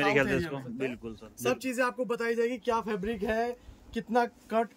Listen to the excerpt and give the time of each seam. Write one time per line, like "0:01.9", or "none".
0:01.0